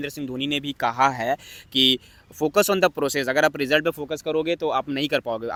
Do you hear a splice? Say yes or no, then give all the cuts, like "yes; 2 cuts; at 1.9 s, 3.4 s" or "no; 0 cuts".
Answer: no; 0 cuts